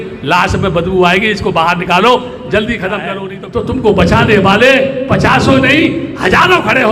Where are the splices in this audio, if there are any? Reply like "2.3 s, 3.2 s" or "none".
3.1 s